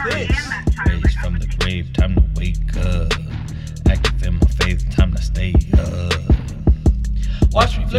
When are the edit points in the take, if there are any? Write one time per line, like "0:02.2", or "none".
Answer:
none

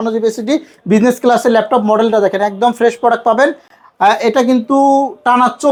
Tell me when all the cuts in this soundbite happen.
none

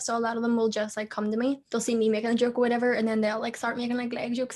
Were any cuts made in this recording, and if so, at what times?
0:01.6

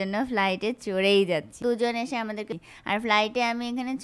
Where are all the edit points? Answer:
0:01.6
0:02.5

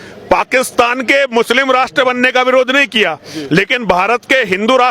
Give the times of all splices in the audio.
none

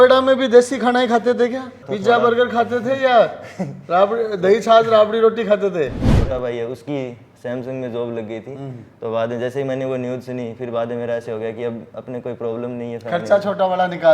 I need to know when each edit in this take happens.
0:01.8
0:06.1

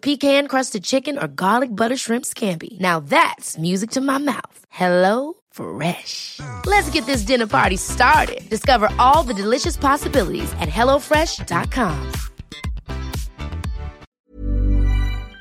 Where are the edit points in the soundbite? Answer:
0:14.0

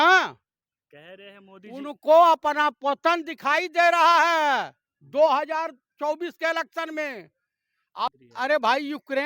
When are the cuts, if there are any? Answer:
0:08.1

